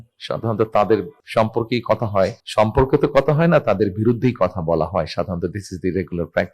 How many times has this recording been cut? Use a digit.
2